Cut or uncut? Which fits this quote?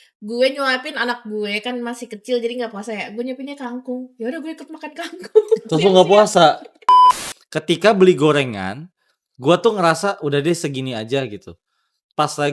cut